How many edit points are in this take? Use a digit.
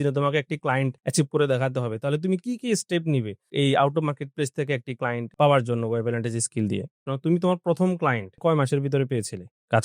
3